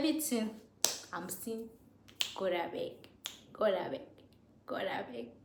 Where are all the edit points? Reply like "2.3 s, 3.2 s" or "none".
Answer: none